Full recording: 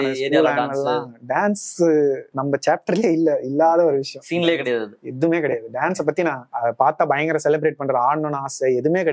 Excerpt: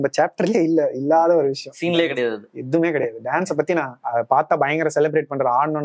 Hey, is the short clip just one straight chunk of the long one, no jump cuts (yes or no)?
yes